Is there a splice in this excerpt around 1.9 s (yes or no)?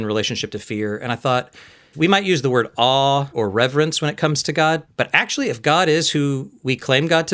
yes